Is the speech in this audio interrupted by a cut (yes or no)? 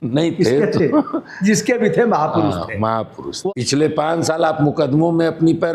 yes